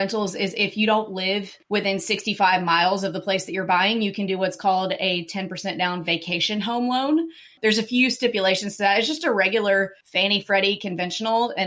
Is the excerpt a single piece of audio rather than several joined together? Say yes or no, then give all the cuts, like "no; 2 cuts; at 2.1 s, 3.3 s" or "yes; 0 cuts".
no; 2 cuts; at 1.5 s, 10.0 s